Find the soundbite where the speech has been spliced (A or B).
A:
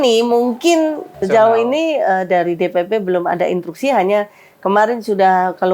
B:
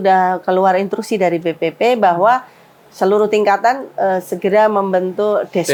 A